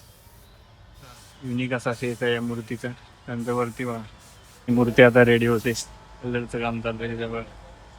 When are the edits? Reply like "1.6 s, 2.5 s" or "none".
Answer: 4.7 s